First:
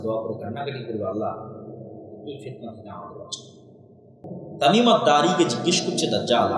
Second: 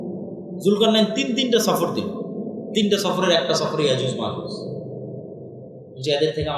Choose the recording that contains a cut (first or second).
first